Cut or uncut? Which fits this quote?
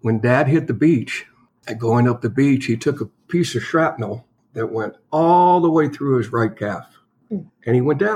uncut